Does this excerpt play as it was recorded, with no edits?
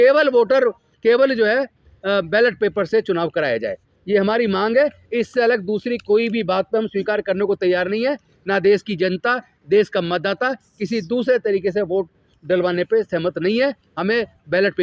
yes; 0 cuts

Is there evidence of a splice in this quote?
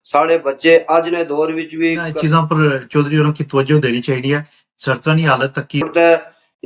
yes; 2 cuts; at 2.1 s, 5.9 s

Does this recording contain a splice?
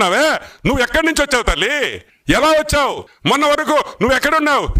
yes; 2 cuts; at 2.1 s, 3.1 s

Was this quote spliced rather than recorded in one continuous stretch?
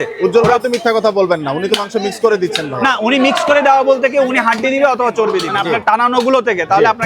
yes; 1 cut; at 5.5 s

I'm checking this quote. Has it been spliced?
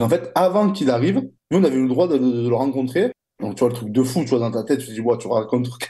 yes; 1 cut; at 1.4 s

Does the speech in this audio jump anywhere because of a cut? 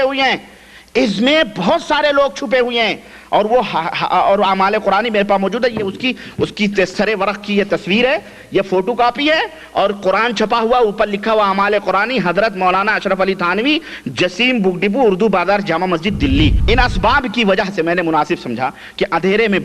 yes; 1 cut; at 16.6 s

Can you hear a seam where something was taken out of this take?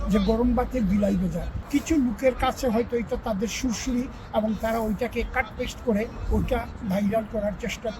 yes; 1 cut; at 1.5 s

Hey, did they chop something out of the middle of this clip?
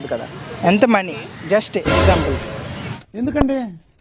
yes; 1 cut; at 3.0 s

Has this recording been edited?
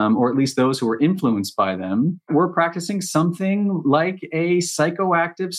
yes; 1 cut; at 2.3 s

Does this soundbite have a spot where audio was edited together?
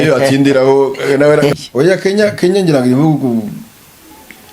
yes; 1 cut; at 1.5 s

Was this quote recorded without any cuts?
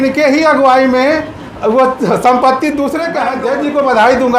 no; 1 cut; at 3.2 s

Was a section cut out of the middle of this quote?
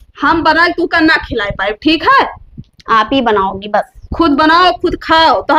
no; 0 cuts

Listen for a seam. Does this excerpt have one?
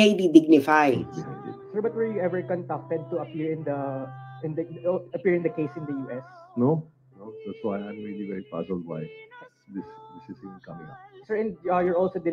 no; 0 cuts

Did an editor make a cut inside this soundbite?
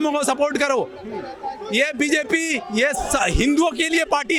no; 0 cuts

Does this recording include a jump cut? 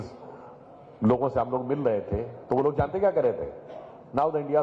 no; 0 cuts

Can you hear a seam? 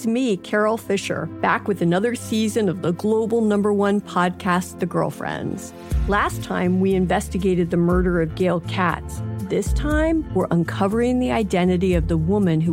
no; 0 cuts

